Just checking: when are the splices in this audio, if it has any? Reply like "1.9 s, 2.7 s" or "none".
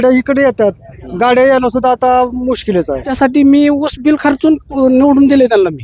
3.1 s